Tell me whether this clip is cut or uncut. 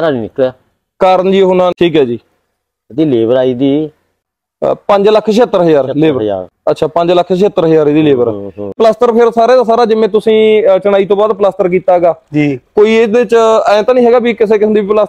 cut